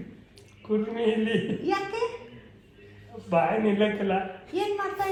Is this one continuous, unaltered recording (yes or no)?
yes